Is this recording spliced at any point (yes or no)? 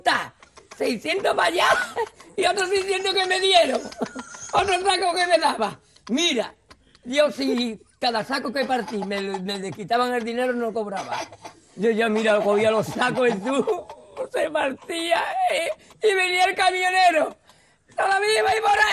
yes